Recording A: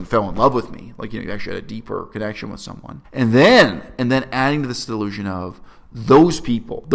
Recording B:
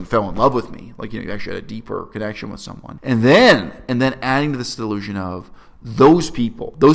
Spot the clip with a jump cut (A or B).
B